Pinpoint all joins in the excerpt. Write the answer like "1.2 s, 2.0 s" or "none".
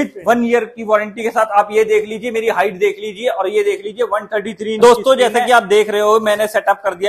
4.8 s